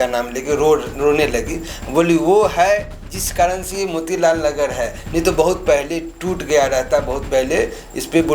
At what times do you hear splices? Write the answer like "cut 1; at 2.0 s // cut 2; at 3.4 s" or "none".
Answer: none